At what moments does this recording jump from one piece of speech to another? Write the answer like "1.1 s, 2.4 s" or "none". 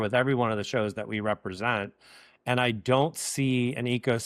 none